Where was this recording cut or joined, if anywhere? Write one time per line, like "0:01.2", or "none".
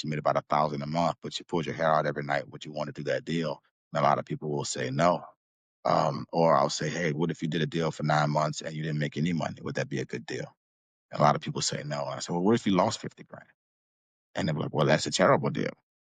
0:03.7